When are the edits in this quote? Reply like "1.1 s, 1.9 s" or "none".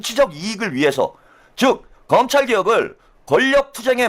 none